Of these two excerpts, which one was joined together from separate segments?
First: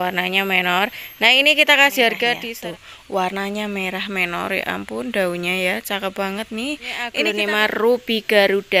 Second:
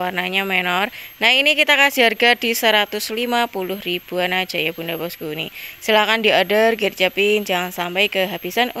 first; 2 cuts; at 2.5 s, 7.1 s

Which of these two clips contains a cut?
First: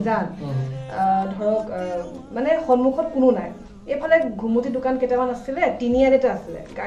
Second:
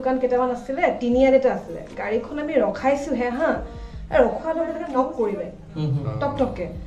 second; 1 cut; at 4.8 s

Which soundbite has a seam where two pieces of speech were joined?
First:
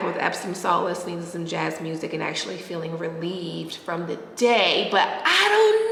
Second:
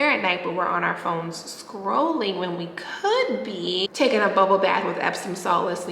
second; 1 cut; at 3.8 s

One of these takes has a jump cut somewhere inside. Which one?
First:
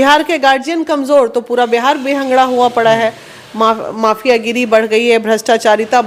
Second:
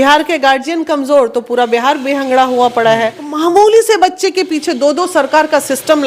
second; 1 cut; at 3.3 s

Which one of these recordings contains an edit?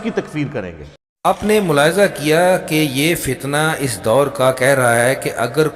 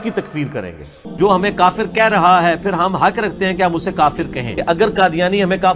second; 2 cuts; at 1.0 s, 4.5 s

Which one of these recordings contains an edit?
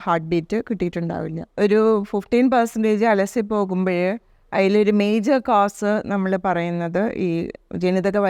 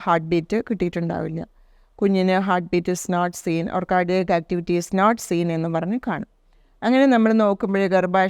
first; 1 cut; at 1.4 s

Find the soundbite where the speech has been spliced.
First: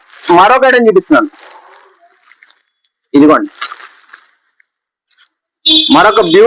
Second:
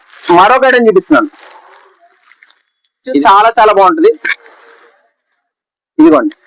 second; 1 cut; at 3.2 s

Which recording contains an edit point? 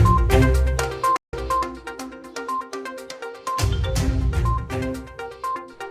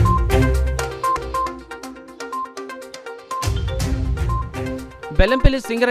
second; 1 cut; at 1.0 s

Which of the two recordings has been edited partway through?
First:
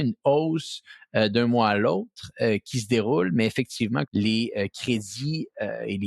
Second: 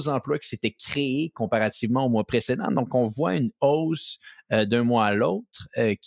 first; 1 cut; at 4.1 s

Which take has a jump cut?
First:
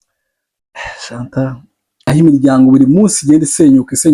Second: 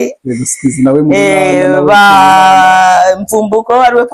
first; 1 cut; at 2.1 s

